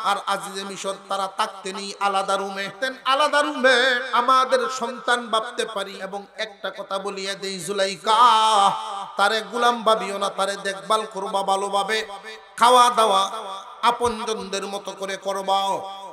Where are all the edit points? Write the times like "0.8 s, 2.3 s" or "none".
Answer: 2.7 s, 4.0 s, 6.0 s